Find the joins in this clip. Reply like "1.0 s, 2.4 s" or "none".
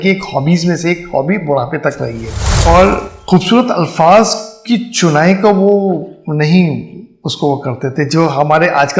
2.5 s